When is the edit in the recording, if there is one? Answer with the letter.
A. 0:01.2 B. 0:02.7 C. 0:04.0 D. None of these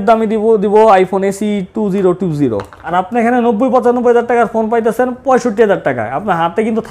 B